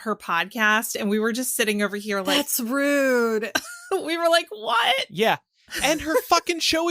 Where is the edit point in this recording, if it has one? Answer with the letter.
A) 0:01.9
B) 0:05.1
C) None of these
B